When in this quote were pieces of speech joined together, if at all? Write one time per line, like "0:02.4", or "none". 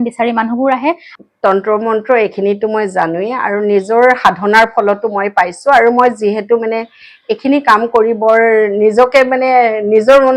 0:01.1

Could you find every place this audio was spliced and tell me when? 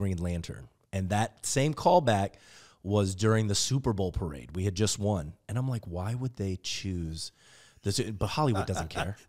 none

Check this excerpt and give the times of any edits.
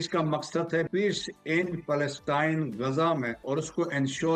0:00.9
0:03.4

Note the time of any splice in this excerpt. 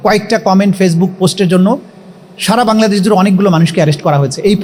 none

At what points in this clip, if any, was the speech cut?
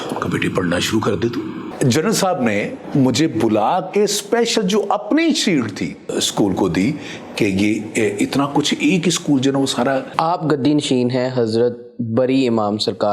0:01.6
0:02.8
0:06.1
0:10.1

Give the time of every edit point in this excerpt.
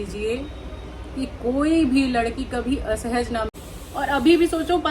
0:03.5

